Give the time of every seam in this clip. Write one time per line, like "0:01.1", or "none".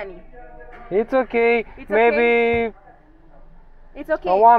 none